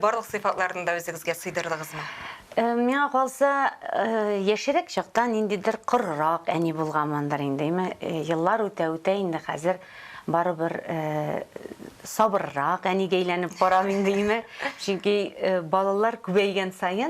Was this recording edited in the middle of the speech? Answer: no; 0 cuts

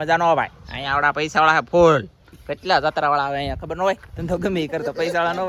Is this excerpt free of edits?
yes; 0 cuts

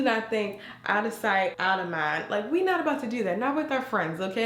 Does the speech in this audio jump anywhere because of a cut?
no; 0 cuts

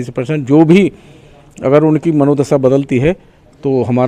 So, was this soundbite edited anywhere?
no; 0 cuts

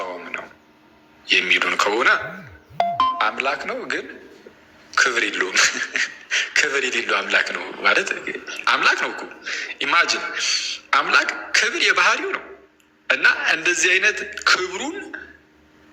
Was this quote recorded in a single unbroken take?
yes; 0 cuts

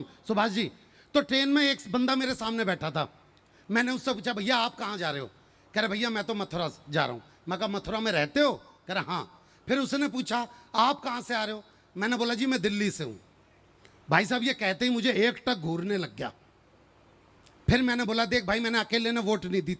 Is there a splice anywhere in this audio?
no; 0 cuts

